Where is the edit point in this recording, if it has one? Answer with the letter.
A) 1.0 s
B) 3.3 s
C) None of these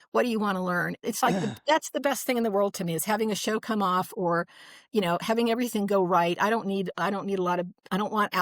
A